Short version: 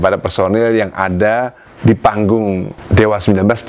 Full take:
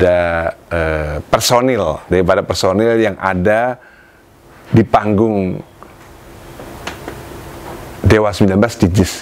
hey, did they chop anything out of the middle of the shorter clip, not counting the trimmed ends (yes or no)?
yes